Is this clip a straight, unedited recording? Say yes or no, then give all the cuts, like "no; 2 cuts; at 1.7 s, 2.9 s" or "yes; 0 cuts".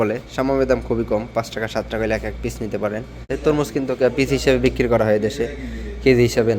no; 1 cut; at 3.3 s